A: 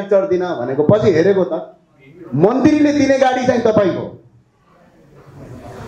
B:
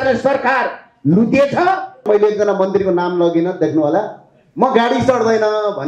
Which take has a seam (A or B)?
B